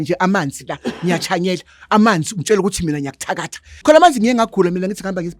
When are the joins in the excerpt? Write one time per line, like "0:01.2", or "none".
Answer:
0:03.7